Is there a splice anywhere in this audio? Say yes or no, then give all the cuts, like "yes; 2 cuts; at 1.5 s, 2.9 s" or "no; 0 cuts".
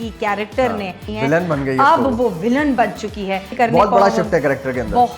yes; 2 cuts; at 1.1 s, 3.5 s